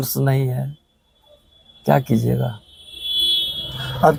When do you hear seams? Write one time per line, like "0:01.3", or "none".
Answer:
none

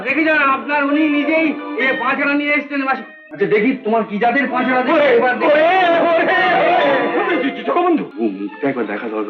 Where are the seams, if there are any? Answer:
0:03.2
0:08.1

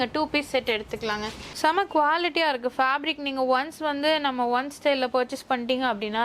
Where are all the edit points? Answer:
0:01.5

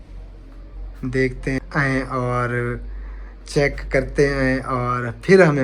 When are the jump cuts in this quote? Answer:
0:01.6

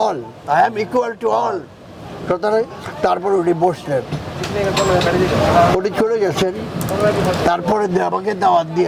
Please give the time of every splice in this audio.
none

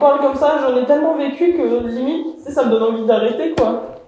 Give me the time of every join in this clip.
none

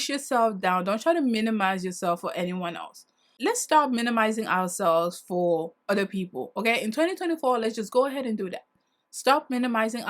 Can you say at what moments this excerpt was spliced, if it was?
0:03.3

